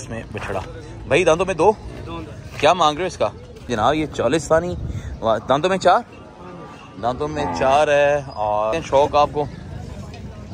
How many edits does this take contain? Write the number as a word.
two